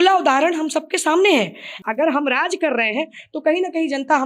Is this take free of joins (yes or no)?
no